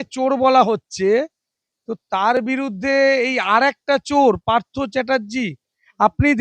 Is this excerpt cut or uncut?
uncut